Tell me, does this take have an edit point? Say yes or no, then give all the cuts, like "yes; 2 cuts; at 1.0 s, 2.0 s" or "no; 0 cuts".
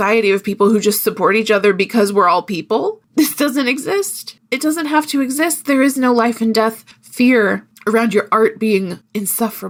no; 0 cuts